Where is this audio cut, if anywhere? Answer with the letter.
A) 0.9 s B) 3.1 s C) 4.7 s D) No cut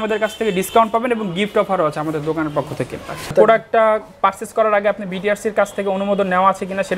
B